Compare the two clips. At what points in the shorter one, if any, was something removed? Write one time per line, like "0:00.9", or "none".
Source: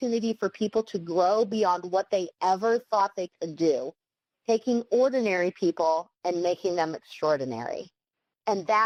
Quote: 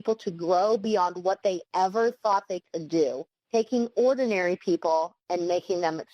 0:03.3